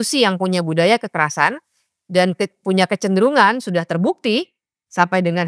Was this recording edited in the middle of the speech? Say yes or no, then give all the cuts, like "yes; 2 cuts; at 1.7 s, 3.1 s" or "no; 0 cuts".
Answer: no; 0 cuts